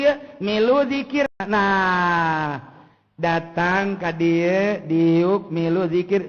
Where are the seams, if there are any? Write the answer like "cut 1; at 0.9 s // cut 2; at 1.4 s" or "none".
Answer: cut 1; at 1.4 s